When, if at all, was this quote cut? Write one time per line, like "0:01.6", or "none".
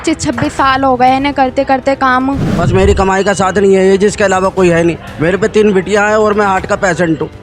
0:02.5